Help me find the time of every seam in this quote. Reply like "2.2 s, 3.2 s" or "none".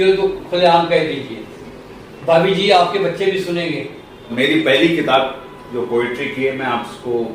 4.3 s